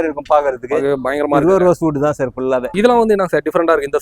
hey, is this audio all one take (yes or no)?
no